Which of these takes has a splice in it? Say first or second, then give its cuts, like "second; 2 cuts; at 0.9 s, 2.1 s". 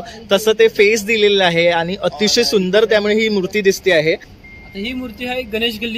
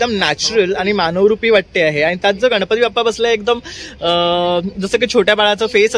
first; 1 cut; at 4.3 s